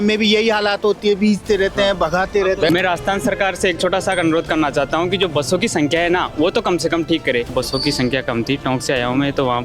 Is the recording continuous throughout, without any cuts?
no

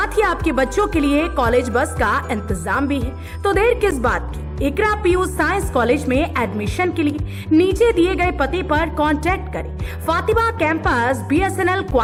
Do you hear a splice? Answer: no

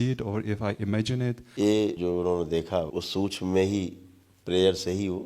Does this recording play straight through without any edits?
no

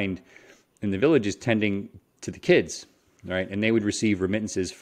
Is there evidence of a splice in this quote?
no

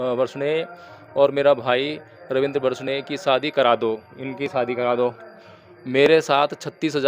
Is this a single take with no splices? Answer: yes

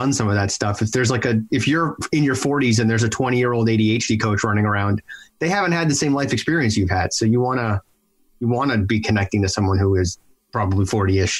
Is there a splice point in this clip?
yes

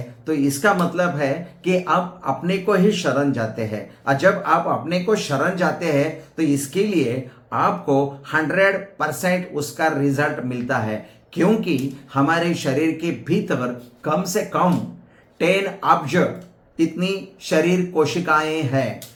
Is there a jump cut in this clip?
no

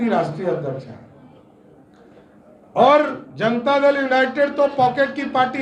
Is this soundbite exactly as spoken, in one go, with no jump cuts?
yes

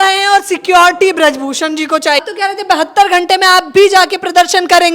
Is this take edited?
yes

